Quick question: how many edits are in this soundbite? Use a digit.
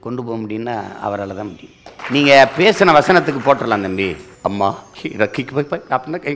2